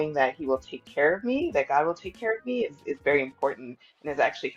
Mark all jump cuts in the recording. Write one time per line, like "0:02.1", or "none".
none